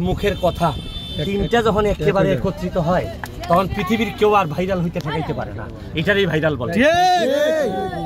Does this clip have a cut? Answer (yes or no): no